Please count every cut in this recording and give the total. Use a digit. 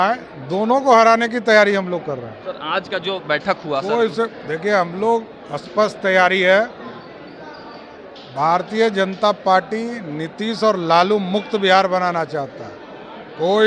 0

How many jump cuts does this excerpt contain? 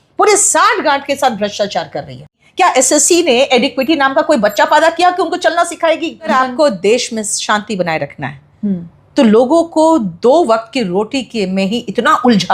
2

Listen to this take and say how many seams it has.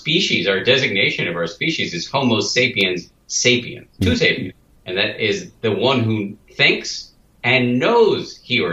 2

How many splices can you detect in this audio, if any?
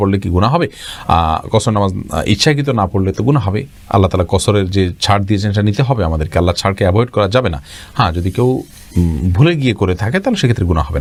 0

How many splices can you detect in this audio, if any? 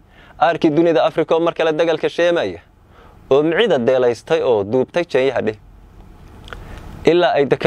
0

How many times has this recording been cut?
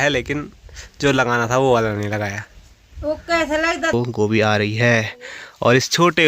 1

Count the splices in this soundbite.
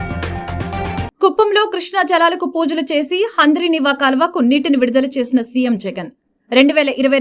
1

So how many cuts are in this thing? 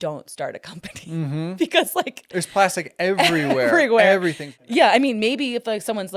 1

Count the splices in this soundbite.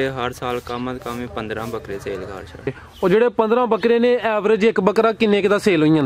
1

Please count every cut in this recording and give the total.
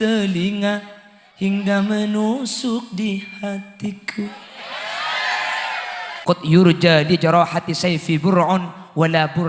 1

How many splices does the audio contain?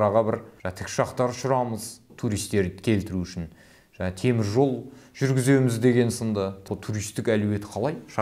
1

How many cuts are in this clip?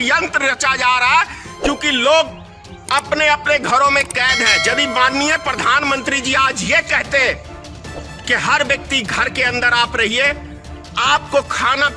0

